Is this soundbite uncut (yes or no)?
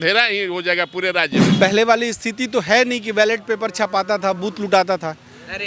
no